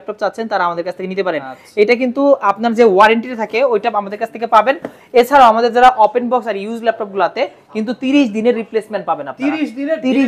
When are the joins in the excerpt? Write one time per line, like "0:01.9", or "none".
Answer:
none